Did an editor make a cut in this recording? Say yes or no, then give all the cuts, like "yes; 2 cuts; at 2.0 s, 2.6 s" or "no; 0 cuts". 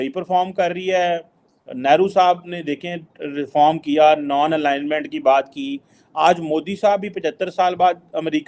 no; 0 cuts